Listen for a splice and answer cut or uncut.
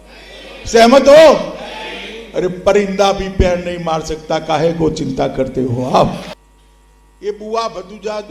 cut